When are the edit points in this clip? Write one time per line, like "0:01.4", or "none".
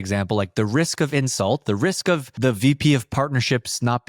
0:02.3